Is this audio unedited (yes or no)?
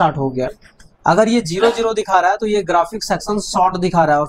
yes